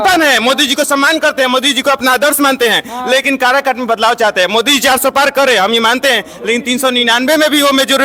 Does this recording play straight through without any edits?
yes; 0 cuts

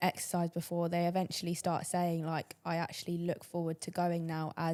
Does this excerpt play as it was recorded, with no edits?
yes; 0 cuts

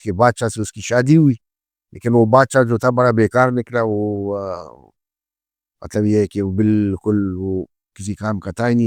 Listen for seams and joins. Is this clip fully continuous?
yes; 0 cuts

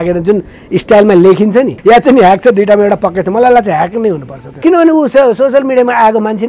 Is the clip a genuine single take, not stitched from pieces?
no; 2 cuts; at 1.7 s, 4.5 s

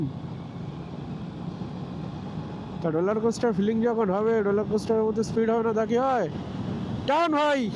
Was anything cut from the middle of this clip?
no; 0 cuts

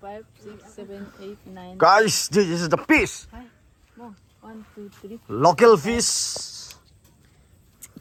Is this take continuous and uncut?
yes; 0 cuts

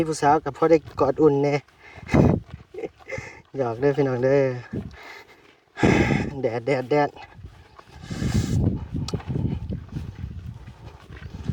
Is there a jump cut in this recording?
no; 0 cuts

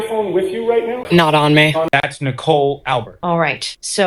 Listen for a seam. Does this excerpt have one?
yes; 2 cuts; at 1.1 s, 1.9 s

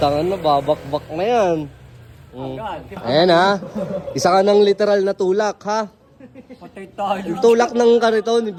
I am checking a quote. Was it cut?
no; 0 cuts

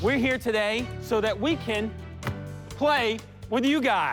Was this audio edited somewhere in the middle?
no; 0 cuts

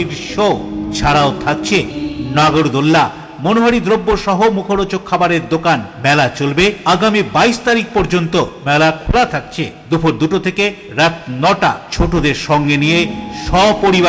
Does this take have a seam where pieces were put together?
no; 0 cuts

